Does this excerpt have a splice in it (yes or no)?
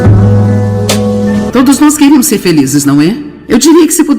yes